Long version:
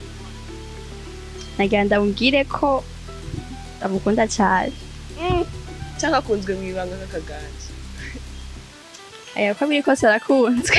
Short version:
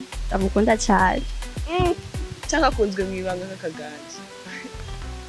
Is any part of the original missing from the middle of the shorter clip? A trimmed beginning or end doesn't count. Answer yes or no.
no